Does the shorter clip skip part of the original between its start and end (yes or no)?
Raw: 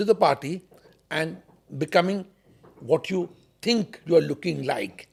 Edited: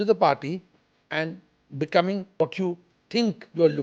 yes